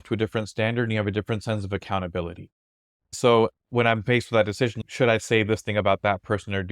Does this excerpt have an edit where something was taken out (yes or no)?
yes